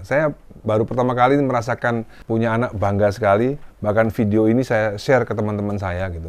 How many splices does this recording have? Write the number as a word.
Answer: one